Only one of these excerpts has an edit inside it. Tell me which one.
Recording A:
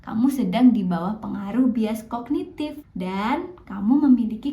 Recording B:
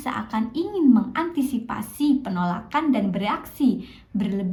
A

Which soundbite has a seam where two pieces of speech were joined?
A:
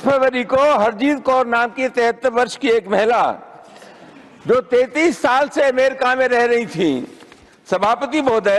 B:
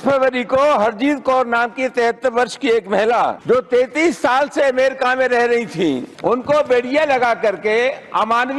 B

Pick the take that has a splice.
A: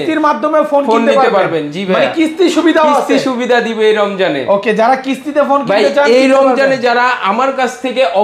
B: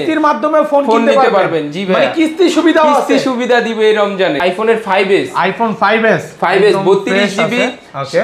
B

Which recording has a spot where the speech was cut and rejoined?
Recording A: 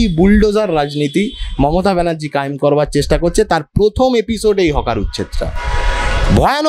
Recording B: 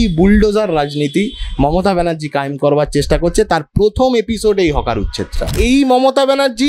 B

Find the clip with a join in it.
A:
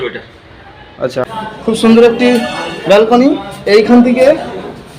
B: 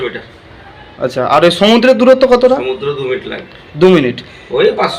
A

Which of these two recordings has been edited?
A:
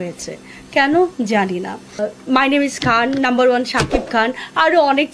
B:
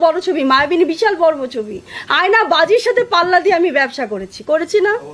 A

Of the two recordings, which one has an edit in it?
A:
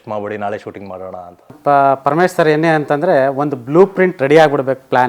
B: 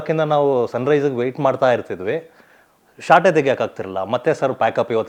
A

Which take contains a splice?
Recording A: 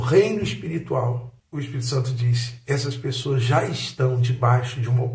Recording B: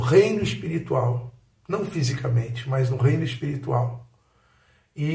A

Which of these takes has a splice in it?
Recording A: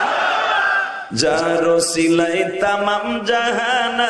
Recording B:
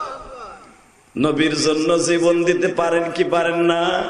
A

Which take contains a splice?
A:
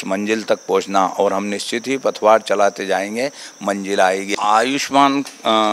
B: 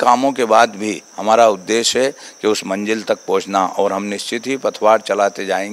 A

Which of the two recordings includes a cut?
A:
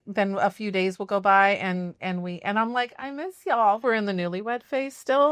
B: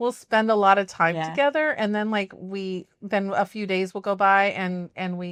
A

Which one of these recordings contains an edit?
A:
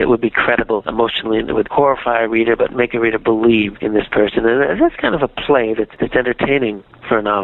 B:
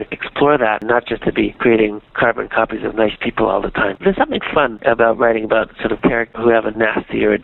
B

